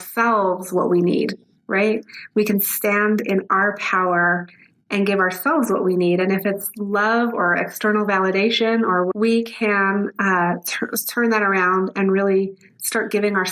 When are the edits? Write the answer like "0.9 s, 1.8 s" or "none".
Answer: 9.1 s

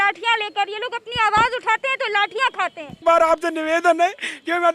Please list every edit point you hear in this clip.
2.9 s

